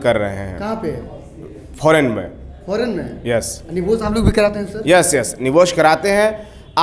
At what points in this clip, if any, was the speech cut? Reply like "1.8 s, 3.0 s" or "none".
none